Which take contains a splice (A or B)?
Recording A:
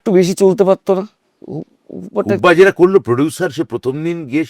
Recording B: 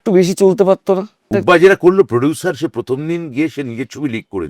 B